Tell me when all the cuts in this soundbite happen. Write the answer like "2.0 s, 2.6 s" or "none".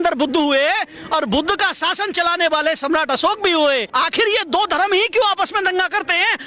3.9 s

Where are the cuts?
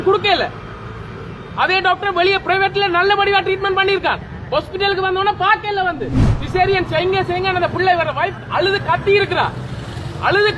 6.3 s

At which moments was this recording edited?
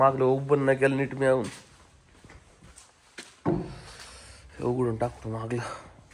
none

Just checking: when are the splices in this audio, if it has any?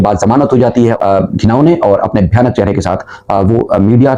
0.9 s

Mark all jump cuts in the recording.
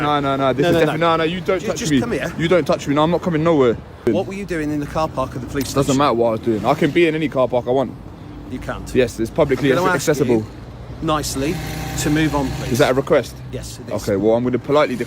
4.0 s

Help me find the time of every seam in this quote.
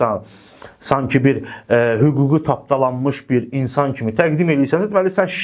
none

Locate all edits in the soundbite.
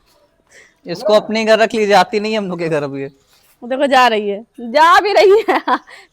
none

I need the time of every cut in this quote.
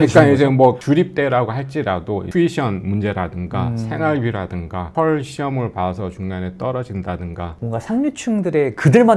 7.5 s

